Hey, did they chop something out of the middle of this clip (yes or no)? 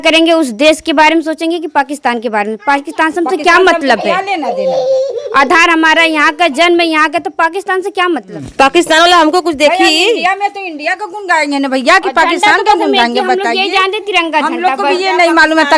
yes